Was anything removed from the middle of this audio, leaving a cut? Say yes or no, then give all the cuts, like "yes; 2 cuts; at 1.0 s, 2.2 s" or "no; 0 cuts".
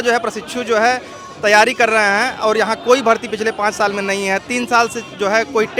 no; 0 cuts